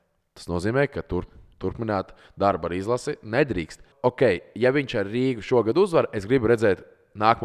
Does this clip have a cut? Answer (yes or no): yes